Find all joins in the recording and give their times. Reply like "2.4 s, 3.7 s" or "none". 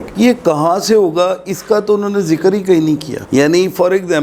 none